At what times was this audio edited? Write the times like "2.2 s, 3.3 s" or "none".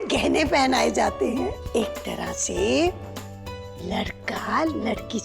1.6 s